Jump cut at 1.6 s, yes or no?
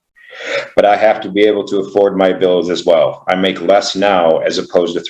no